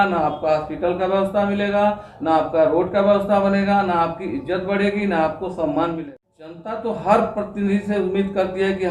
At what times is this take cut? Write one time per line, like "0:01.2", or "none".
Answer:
0:06.0